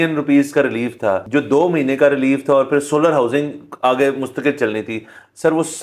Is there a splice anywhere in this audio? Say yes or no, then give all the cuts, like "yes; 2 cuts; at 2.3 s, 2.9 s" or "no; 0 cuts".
yes; 1 cut; at 1.2 s